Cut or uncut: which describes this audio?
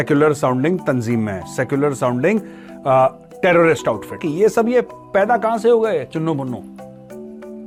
uncut